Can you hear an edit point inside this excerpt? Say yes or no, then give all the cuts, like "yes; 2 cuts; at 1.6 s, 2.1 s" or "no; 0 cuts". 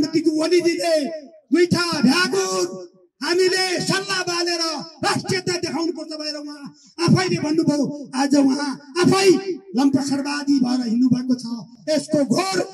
no; 0 cuts